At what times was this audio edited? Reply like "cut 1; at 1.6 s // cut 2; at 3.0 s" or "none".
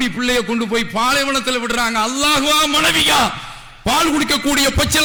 none